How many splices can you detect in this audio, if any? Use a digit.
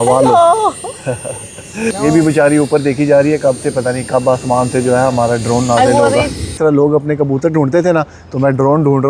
2